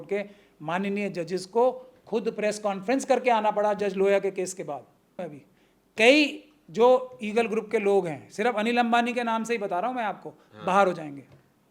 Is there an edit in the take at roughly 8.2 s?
no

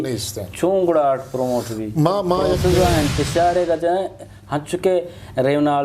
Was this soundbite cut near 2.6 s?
yes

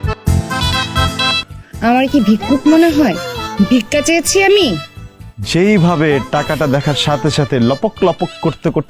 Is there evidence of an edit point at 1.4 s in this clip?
yes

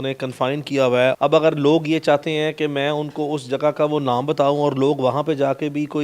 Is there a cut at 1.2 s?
yes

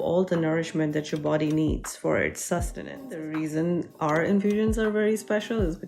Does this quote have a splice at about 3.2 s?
yes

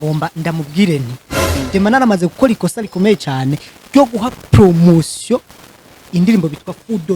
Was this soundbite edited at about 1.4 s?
yes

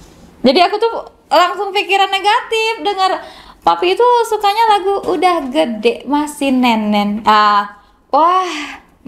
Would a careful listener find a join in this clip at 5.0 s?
no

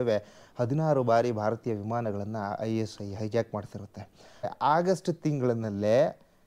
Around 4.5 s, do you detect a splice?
yes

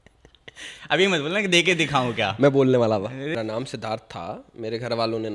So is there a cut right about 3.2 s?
yes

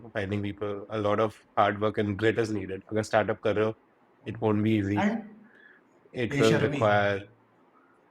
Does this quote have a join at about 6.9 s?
no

